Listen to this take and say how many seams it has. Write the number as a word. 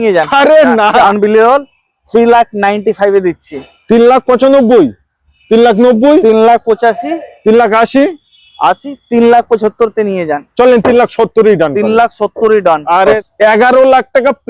two